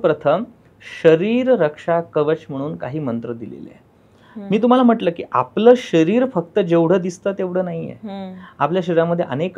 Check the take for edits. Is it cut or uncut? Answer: uncut